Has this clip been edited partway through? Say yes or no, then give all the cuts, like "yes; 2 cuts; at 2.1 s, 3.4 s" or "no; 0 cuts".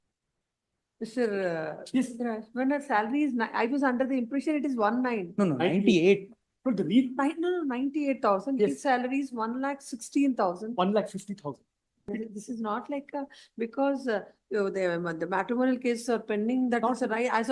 yes; 1 cut; at 12.1 s